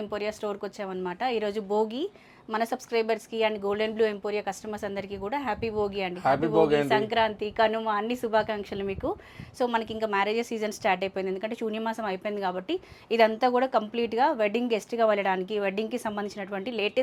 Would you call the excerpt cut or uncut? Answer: uncut